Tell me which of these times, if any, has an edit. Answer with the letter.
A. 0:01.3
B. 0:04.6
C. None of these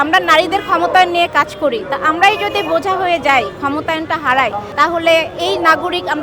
B